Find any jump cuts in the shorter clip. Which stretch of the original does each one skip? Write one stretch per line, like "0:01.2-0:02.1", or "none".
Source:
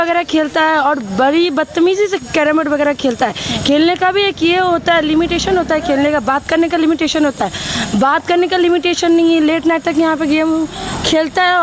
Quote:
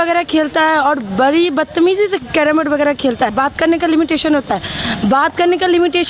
0:03.4-0:06.3